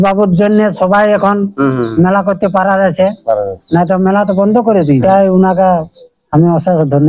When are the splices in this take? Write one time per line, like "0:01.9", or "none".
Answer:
0:05.0